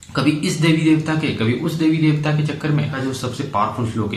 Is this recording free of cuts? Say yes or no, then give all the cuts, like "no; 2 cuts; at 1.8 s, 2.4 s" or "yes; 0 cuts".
no; 1 cut; at 2.9 s